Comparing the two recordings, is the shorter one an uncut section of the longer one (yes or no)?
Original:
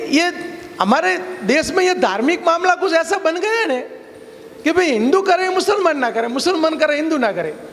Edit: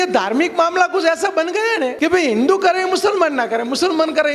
no